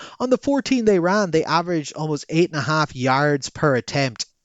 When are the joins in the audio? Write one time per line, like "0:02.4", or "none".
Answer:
none